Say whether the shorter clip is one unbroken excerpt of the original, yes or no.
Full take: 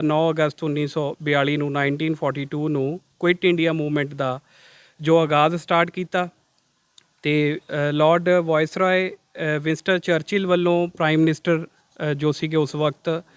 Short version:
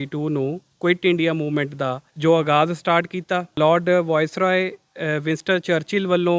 no